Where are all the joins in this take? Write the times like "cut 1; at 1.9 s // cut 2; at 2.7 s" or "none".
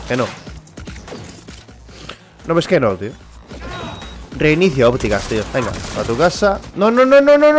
cut 1; at 6.7 s